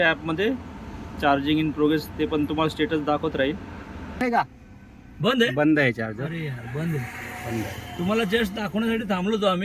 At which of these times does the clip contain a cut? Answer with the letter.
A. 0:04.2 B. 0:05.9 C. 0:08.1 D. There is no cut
A